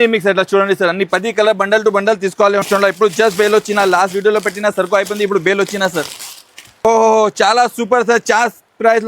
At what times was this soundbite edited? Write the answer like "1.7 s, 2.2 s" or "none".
2.7 s, 6.8 s

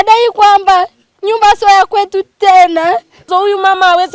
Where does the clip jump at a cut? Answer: 3.2 s

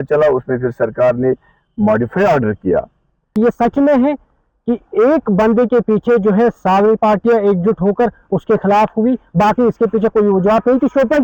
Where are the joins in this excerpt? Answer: 3.3 s

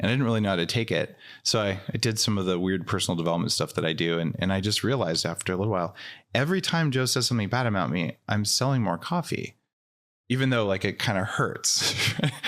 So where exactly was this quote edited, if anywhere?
none

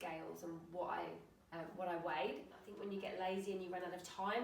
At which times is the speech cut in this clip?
2.6 s

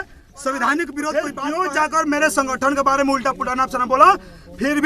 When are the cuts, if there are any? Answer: 1.1 s

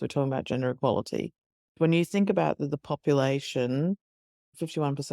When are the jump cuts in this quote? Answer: 1.8 s

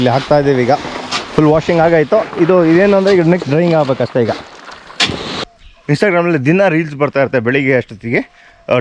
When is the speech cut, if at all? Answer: 5.6 s

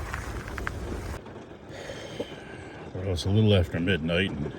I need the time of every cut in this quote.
1.2 s

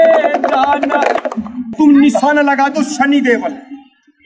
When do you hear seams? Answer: 1.7 s

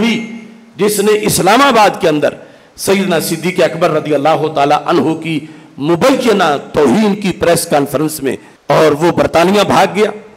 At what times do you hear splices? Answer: 8.5 s

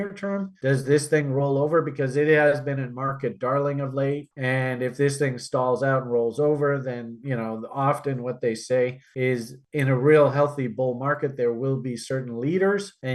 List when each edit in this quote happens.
none

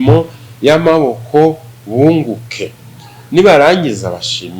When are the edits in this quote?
none

